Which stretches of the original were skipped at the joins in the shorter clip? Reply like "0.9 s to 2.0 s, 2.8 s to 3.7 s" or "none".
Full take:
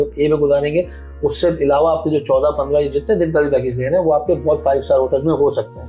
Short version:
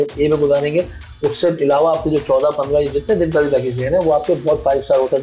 none